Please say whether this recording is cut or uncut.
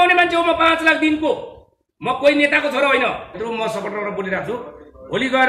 cut